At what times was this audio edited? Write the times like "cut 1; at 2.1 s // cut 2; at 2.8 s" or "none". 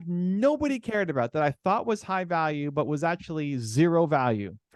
none